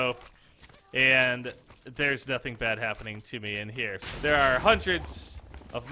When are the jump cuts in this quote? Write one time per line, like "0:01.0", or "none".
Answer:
0:04.0